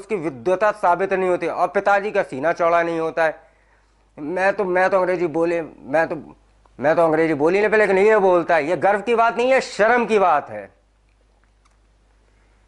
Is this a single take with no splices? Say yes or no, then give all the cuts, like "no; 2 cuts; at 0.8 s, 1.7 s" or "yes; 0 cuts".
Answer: yes; 0 cuts